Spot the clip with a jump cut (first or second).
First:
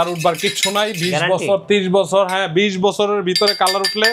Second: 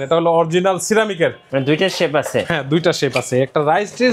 second